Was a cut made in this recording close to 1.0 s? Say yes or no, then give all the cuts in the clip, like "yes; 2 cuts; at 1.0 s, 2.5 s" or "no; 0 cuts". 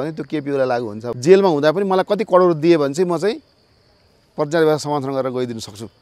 yes; 1 cut; at 1.0 s